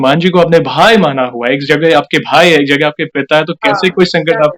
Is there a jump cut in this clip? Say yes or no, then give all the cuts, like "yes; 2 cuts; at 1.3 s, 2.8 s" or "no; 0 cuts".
no; 0 cuts